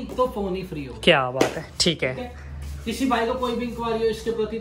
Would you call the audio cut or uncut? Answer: uncut